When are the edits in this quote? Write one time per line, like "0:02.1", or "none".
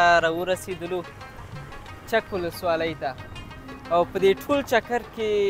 none